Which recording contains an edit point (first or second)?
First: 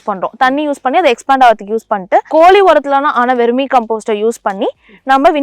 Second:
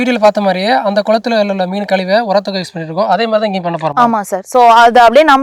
first